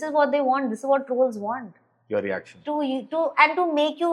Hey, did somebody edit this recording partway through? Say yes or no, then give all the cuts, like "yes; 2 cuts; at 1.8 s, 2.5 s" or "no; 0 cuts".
no; 0 cuts